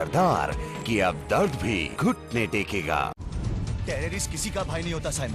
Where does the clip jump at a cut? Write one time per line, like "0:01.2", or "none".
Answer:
0:03.2